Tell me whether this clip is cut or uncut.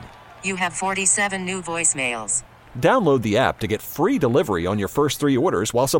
uncut